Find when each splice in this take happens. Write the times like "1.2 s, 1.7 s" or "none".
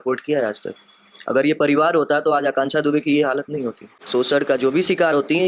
4.0 s